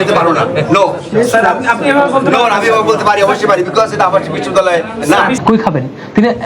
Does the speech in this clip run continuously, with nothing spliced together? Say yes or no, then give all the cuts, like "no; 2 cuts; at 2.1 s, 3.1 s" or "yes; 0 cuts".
no; 1 cut; at 5.4 s